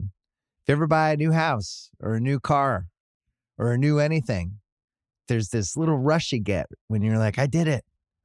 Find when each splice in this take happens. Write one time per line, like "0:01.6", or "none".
none